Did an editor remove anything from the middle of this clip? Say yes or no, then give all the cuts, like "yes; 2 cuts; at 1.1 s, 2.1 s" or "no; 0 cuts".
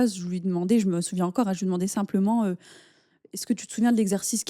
no; 0 cuts